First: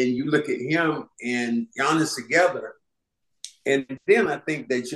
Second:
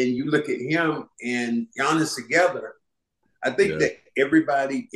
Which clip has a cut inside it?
second; 1 cut; at 3.3 s

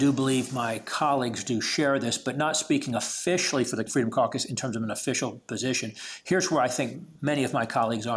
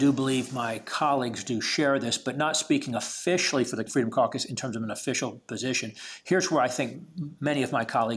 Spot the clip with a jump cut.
first; 1 cut; at 7.1 s

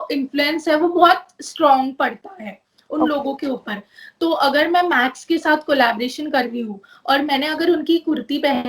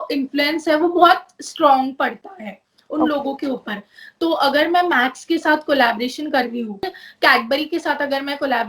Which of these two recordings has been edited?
second; 1 cut; at 7.0 s

